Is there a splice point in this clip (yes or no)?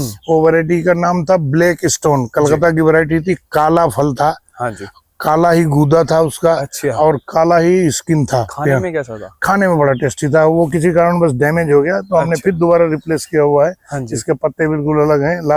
no